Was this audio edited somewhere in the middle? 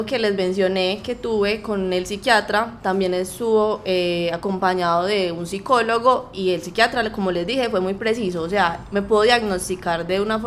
no; 0 cuts

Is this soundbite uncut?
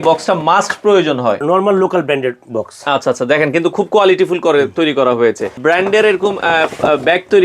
no; 2 cuts; at 1.4 s, 5.6 s

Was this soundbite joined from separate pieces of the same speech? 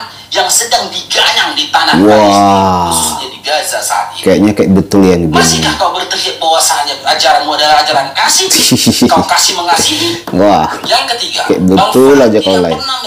no; 0 cuts

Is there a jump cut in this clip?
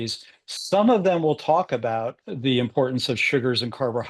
yes; 1 cut; at 2.2 s

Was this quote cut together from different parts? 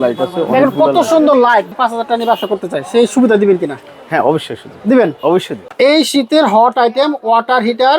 yes; 2 cuts; at 1.7 s, 5.6 s

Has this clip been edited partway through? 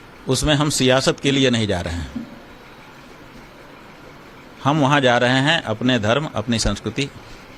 no; 0 cuts

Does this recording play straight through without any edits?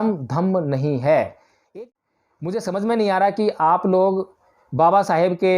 no; 1 cut; at 1.6 s

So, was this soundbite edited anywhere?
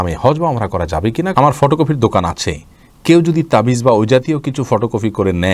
yes; 1 cut; at 1.3 s

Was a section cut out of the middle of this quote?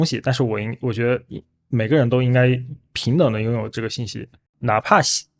yes; 1 cut; at 4.5 s

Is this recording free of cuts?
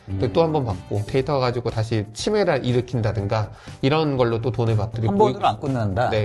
no; 2 cuts; at 1.1 s, 4.9 s

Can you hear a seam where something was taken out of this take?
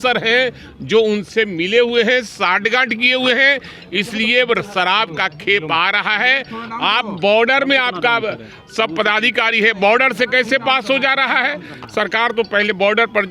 no; 0 cuts

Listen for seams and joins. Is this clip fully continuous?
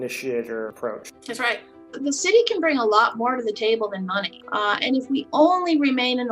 no; 1 cut; at 1.7 s

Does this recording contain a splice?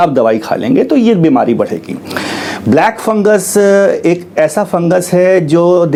no; 0 cuts

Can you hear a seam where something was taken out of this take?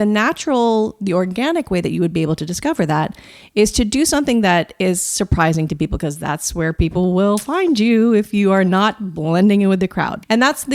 no; 0 cuts

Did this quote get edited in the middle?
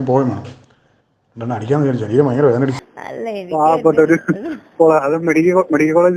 yes; 1 cut; at 2.8 s

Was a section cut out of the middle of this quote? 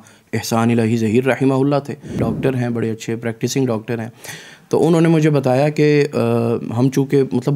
yes; 1 cut; at 2.3 s

